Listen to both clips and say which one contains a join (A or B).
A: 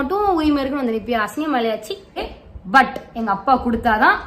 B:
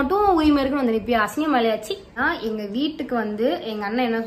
A